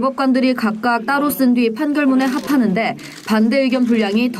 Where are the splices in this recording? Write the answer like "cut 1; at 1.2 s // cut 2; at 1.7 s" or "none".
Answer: none